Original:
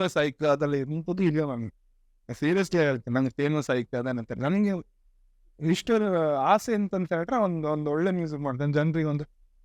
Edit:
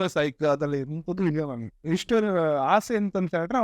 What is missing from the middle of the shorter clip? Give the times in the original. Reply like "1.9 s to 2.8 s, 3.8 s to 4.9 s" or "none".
1.7 s to 5.4 s